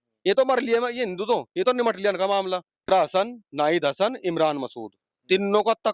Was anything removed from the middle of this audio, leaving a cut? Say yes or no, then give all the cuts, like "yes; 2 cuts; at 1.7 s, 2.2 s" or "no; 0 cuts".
yes; 1 cut; at 2.9 s